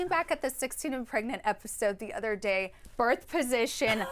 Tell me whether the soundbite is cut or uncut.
cut